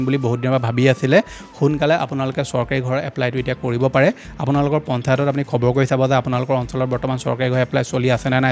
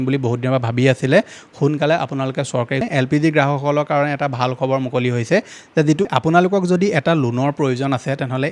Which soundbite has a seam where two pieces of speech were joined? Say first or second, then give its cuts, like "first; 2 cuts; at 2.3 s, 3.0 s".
second; 2 cuts; at 2.8 s, 6.1 s